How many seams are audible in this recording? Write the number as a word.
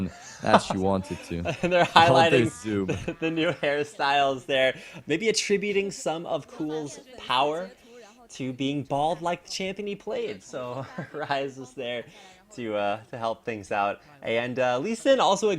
one